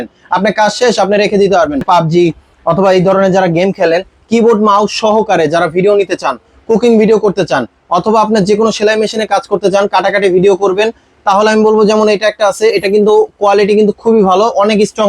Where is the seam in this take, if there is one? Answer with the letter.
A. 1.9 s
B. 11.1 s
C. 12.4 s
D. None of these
A